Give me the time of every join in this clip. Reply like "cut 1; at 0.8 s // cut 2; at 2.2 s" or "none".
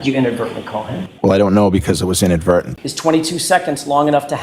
cut 1; at 1.0 s // cut 2; at 2.8 s

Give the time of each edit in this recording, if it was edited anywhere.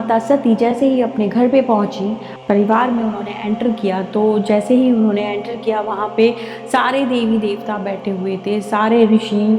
cut 1; at 2.3 s

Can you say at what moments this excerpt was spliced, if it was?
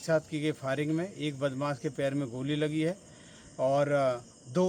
none

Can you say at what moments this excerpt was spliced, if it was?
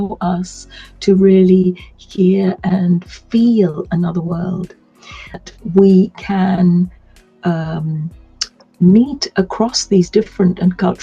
cut 1; at 5.4 s

